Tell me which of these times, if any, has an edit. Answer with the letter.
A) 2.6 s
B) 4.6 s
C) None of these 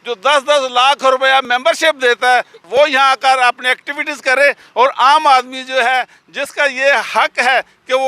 A